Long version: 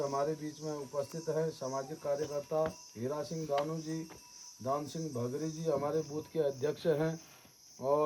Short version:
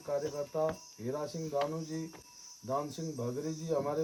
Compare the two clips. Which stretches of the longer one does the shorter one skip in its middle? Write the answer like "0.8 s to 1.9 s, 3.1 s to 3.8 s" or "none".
none